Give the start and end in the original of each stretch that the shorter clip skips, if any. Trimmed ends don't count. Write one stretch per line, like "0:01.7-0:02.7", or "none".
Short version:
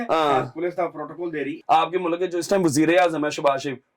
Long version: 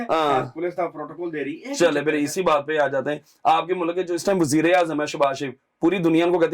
0:01.5-0:03.3

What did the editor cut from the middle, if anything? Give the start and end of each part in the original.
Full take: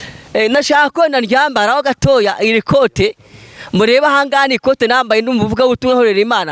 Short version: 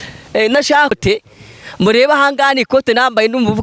0:00.9-0:02.9

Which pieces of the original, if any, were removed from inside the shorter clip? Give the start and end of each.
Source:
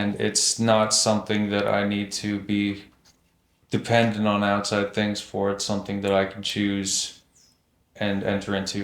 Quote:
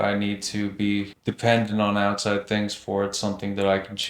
0:02.9-0:03.7

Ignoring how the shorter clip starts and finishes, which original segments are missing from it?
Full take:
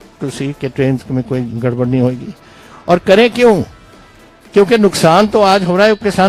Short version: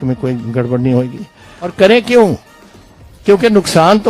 0:02.8-0:03.0

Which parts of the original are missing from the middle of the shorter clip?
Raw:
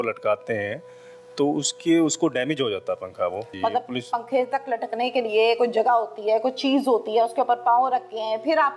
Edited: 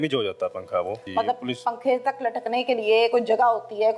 none

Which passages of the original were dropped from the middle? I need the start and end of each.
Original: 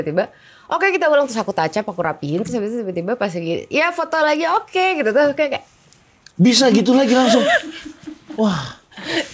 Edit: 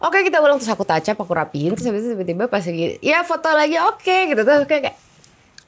none

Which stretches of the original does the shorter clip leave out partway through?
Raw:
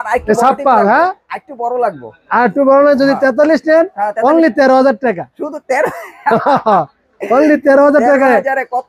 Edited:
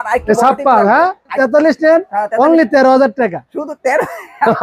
0:01.3-0:03.2

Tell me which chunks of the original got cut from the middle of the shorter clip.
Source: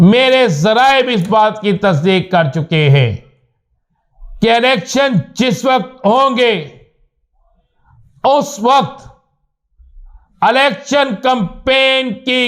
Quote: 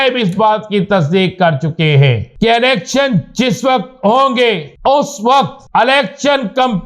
0:03.2-0:04.3
0:06.7-0:08.1
0:09.0-0:10.3

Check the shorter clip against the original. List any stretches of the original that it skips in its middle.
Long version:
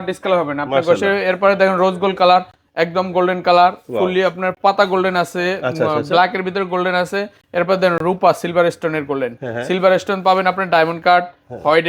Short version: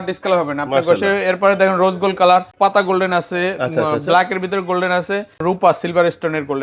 0:02.5-0:04.5
0:07.4-0:08.0

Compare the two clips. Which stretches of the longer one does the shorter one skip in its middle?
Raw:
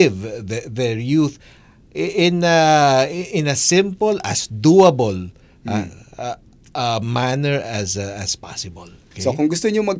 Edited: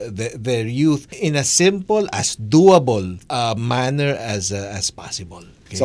0:01.4-0:03.2
0:05.3-0:06.6

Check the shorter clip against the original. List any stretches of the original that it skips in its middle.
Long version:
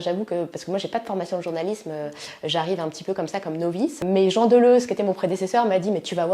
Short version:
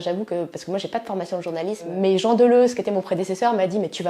0:01.9-0:04.0

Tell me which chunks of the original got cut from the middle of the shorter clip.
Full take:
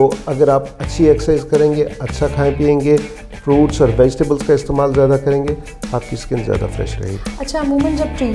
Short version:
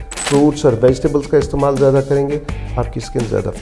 none

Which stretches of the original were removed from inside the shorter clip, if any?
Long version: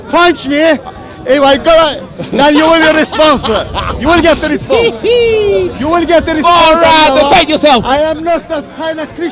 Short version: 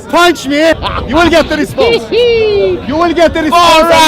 0:00.9-0:03.8

